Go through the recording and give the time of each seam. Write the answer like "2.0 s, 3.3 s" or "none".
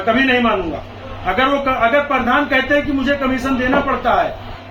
none

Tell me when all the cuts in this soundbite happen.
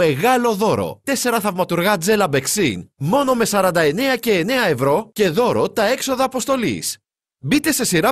1.0 s

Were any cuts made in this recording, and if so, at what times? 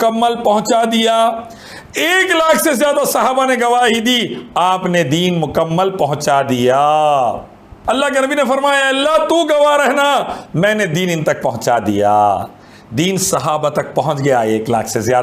7.7 s

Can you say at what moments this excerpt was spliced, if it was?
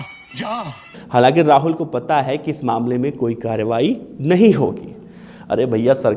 0.9 s

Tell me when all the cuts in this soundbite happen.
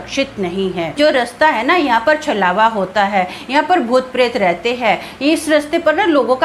0.9 s

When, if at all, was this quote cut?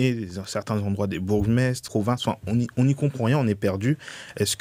1.8 s

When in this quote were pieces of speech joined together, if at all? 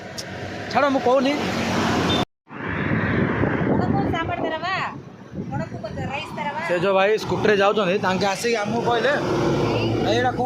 2.2 s

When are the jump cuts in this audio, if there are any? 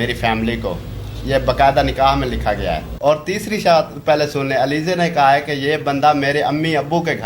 2.9 s

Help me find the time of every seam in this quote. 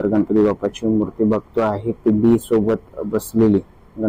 none

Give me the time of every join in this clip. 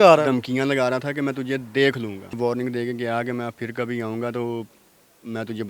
2.4 s

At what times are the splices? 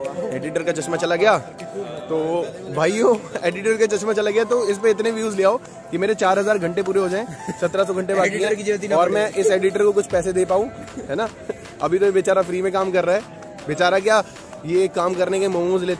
none

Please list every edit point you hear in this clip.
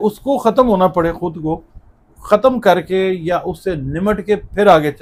none

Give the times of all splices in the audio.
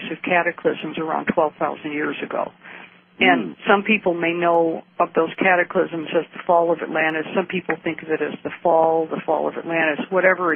none

